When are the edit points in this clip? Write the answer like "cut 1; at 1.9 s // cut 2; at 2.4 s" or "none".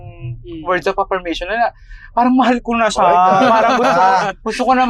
none